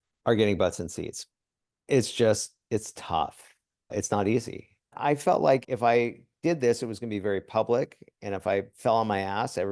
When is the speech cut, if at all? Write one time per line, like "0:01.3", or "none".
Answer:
0:04.9